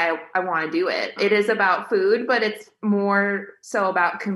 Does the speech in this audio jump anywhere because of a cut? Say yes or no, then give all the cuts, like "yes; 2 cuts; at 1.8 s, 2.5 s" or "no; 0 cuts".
yes; 1 cut; at 1.1 s